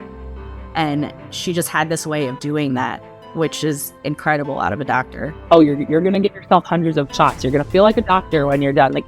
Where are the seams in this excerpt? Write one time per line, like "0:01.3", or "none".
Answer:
0:05.3